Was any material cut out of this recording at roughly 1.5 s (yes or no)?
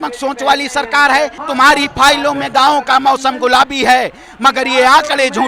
yes